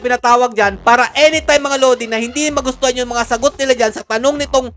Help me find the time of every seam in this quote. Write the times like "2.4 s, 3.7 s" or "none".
none